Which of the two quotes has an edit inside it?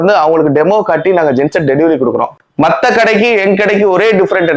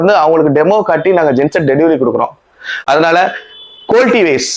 first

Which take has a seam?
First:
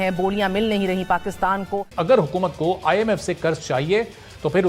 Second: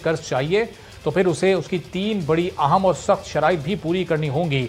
first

